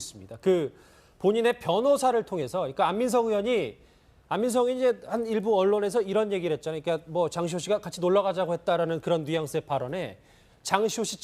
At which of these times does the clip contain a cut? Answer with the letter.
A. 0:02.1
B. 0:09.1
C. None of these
C